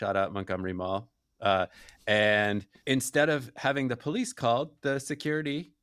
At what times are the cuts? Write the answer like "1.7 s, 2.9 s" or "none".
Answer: 2.7 s